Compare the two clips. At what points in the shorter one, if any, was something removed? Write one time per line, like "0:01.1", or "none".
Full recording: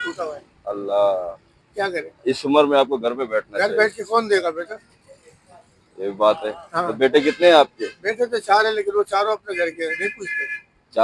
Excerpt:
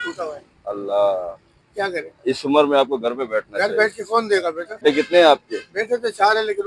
0:04.8